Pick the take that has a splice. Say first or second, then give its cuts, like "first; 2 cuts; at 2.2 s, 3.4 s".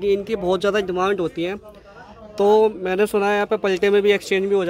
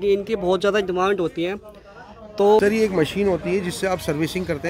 second; 1 cut; at 2.6 s